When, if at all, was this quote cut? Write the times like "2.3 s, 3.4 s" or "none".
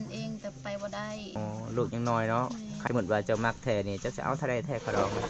1.3 s, 2.8 s